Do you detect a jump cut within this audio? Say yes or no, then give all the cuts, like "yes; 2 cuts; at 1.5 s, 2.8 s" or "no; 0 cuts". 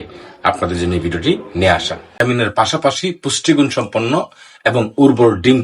yes; 1 cut; at 2.1 s